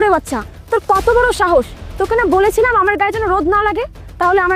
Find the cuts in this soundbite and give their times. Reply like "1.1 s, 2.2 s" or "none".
none